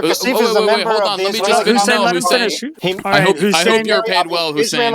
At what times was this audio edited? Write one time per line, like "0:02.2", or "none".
0:02.7